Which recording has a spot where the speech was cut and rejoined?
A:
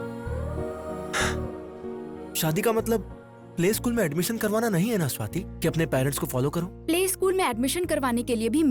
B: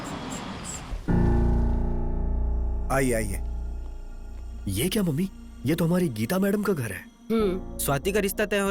B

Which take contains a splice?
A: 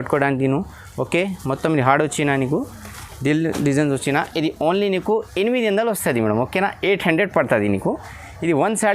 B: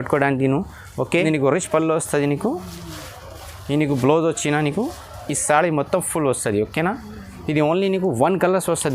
B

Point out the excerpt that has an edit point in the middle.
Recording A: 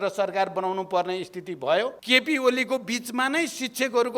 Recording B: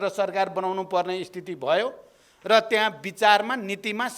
A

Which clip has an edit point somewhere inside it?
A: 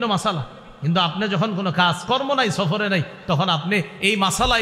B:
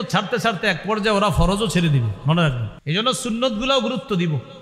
B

